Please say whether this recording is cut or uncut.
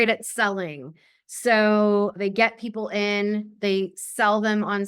cut